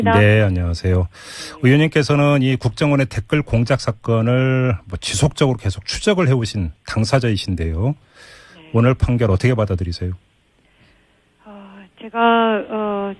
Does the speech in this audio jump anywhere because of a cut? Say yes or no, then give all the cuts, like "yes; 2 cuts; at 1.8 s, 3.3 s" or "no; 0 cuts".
yes; 1 cut; at 7.8 s